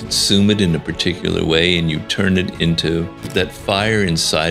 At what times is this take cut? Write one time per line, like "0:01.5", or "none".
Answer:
0:03.3